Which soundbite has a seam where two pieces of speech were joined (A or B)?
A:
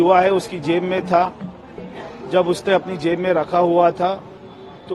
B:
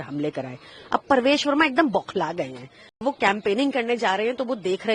B